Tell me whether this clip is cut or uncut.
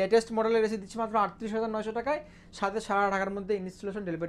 uncut